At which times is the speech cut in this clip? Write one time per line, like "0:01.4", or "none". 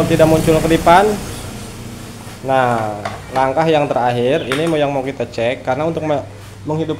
none